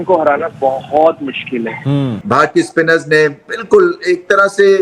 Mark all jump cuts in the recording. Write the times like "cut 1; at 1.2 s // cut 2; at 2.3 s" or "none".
cut 1; at 2.2 s